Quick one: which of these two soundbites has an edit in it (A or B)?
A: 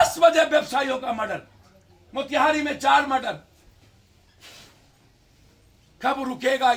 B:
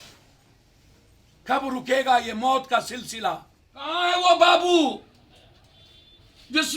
B